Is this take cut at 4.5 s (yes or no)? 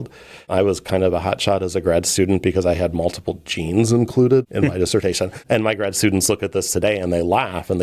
yes